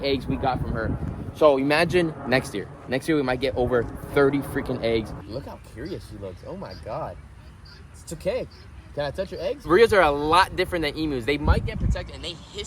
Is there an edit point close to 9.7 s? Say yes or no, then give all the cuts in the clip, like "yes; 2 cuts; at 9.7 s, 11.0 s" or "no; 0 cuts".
yes; 2 cuts; at 5.1 s, 9.7 s